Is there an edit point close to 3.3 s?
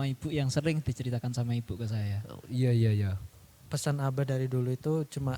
yes; 1 cut; at 3.3 s

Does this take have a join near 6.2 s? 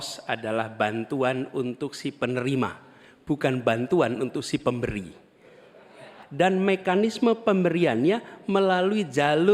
yes; 1 cut; at 6.2 s

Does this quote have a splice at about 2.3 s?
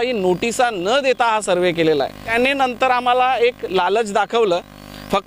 yes; 1 cut; at 2.3 s

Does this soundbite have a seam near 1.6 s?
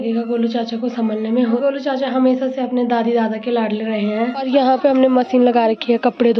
yes; 2 cuts; at 1.6 s, 4.4 s

